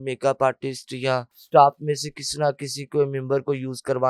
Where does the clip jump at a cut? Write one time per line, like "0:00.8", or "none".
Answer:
0:01.4

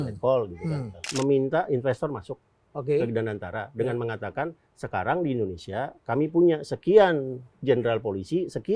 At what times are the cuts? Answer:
0:01.0

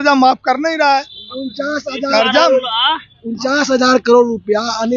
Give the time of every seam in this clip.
none

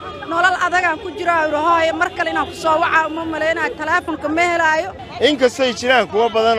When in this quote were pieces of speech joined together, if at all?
0:05.0

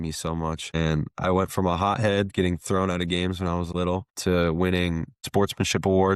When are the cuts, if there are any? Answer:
0:05.2

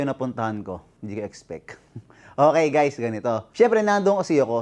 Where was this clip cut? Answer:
0:00.9
0:03.4

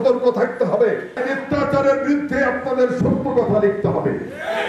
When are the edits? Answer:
0:01.2

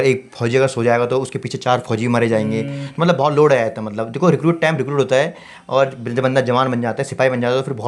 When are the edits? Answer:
none

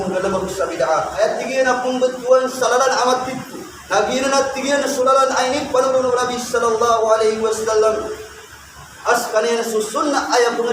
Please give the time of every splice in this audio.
0:01.1

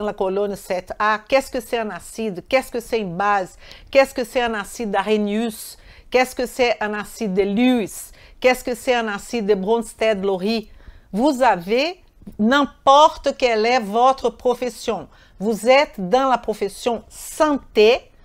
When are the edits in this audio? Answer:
none

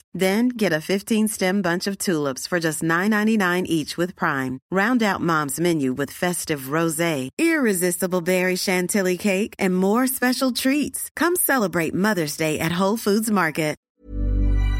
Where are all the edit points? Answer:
0:13.9

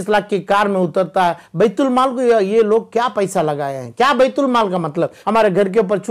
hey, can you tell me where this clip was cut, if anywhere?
0:05.2

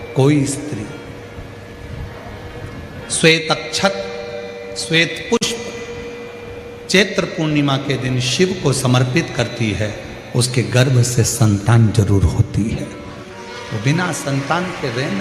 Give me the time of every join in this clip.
none

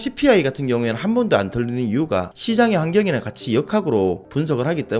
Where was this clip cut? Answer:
none

